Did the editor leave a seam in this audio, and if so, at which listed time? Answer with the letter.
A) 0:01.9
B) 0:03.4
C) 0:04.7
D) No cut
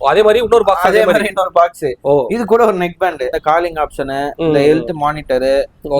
B